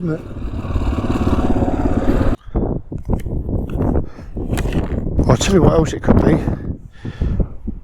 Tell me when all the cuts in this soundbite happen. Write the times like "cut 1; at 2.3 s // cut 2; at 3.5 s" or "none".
cut 1; at 2.4 s